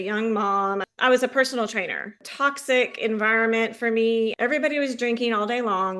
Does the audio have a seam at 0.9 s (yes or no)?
yes